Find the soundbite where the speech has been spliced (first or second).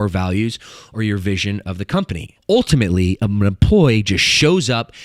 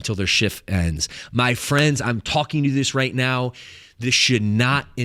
first